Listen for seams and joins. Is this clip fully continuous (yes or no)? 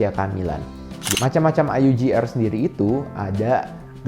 no